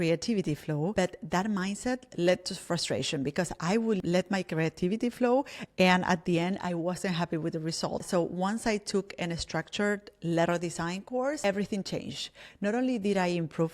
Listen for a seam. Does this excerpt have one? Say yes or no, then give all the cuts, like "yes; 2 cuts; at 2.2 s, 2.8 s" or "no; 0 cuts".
yes; 4 cuts; at 0.9 s, 4.0 s, 8.0 s, 11.4 s